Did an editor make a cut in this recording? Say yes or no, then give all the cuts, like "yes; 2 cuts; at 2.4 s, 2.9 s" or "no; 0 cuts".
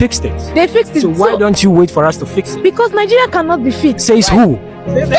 no; 0 cuts